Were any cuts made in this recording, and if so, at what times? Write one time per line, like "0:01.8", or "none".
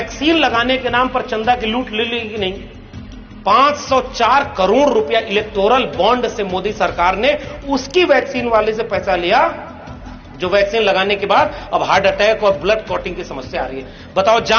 none